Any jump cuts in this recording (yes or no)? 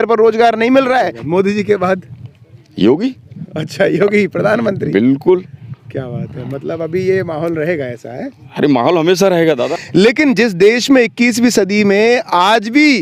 yes